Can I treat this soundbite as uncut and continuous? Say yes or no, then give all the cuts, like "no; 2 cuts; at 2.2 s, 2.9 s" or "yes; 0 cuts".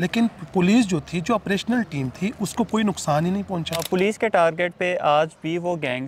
no; 1 cut; at 3.8 s